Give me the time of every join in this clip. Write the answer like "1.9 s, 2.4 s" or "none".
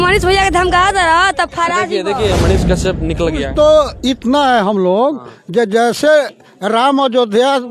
2.4 s

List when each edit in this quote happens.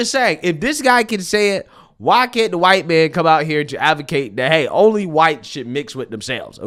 none

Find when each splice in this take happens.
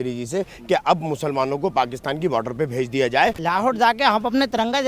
3.4 s

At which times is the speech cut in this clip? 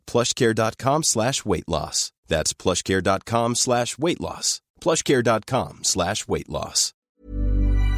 6.9 s

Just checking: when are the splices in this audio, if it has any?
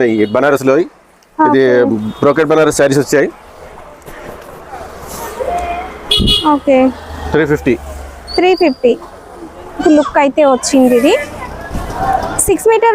9.8 s

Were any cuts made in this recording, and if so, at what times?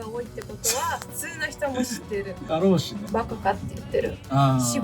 3.0 s

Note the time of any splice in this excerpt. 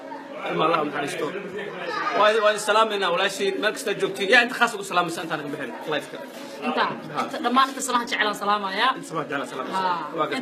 8.4 s

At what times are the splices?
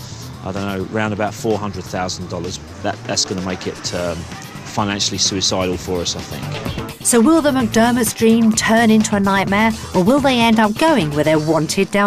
none

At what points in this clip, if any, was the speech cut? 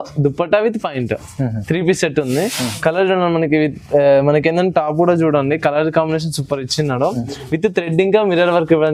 none

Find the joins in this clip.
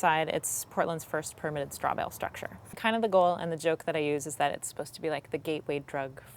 2.7 s

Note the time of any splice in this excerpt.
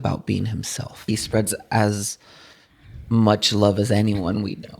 1.1 s

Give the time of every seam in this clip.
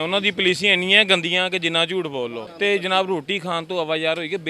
2.4 s

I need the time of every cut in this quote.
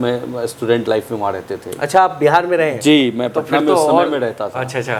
none

